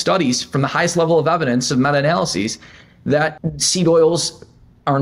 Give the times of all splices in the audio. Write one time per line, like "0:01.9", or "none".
0:03.5

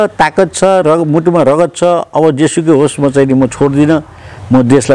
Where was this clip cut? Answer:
none

